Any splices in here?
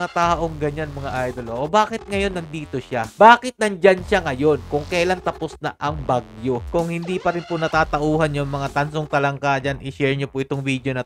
yes; 1 cut; at 6.6 s

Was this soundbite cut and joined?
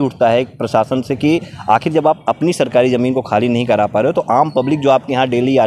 no; 0 cuts

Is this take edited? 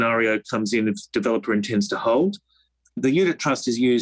yes; 1 cut; at 3.0 s

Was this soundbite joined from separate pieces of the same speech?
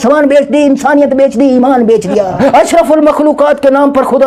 no; 0 cuts

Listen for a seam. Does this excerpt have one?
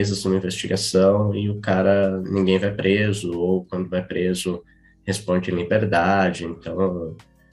no; 0 cuts

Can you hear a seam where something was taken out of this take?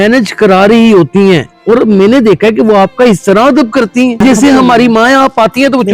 yes; 1 cut; at 4.2 s

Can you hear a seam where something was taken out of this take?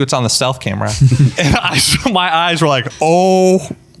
yes; 2 cuts; at 1.3 s, 2.9 s

